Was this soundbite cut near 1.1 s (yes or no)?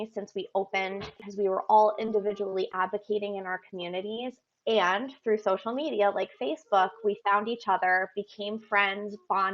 yes